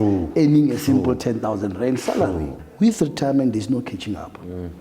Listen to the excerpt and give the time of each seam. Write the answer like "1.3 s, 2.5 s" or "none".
2.6 s